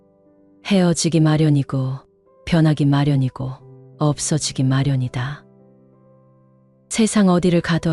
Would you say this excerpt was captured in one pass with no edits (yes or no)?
yes